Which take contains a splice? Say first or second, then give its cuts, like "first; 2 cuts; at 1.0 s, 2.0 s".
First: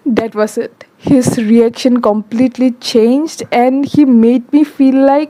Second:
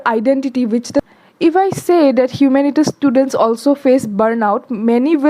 second; 1 cut; at 1.0 s